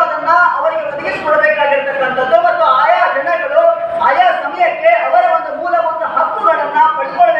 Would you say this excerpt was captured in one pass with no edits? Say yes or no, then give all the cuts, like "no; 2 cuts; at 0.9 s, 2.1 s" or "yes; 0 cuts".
yes; 0 cuts